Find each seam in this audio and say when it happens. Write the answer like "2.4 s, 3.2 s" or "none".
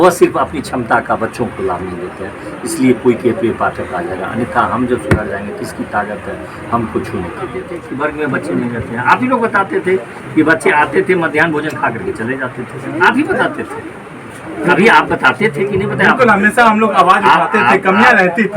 7.8 s